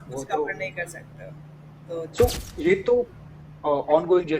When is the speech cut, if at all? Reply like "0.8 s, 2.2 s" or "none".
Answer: 2.1 s